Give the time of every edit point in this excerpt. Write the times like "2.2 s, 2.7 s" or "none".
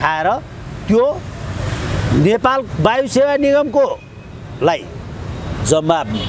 none